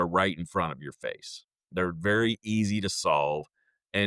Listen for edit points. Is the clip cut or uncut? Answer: uncut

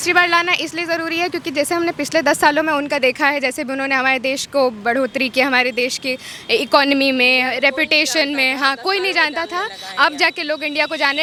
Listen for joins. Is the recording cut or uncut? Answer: uncut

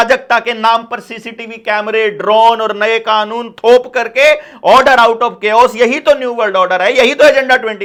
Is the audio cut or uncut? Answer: uncut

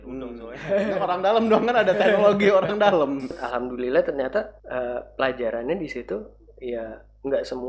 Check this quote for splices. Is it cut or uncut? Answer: cut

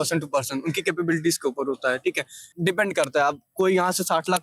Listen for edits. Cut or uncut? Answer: cut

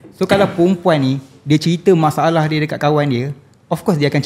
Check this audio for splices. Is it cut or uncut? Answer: uncut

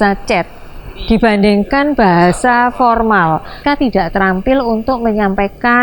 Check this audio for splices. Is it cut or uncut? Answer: cut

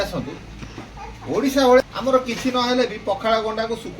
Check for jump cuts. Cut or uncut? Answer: cut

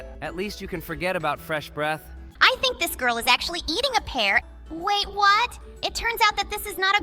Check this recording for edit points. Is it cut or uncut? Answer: cut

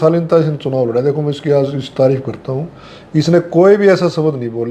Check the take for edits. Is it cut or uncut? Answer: uncut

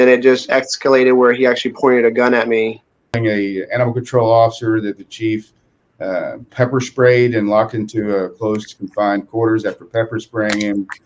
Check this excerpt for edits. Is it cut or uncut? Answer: cut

